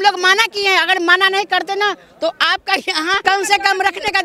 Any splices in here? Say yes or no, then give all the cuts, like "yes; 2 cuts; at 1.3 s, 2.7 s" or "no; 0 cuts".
yes; 1 cut; at 3.2 s